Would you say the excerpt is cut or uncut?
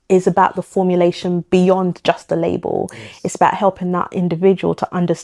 uncut